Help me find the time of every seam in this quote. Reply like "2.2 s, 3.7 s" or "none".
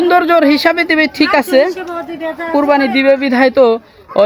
2.5 s

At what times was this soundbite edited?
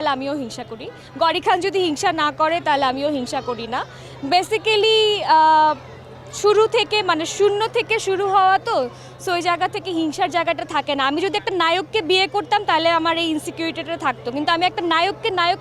none

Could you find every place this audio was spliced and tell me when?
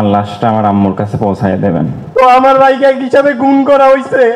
2.0 s

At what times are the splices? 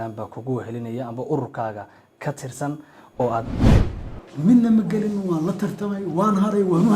3.6 s

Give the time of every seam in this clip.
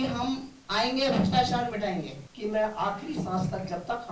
2.2 s

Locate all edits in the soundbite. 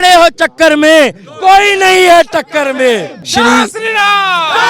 3.2 s

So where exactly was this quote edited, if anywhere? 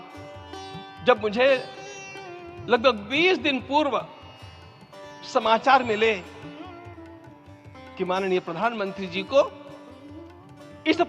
6.3 s, 7.9 s

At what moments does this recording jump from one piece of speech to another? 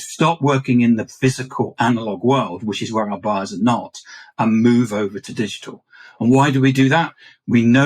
1.0 s, 5.2 s

